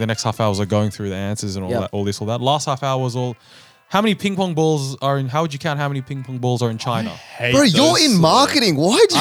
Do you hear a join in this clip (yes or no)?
no